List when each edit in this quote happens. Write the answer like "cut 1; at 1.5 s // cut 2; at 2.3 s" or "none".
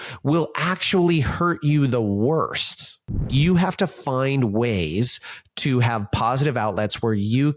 cut 1; at 3.3 s